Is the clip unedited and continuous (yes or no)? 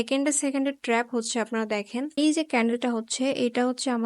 no